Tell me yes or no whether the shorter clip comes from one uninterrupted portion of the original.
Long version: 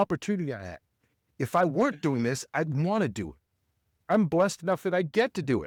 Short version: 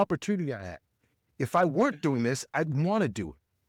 yes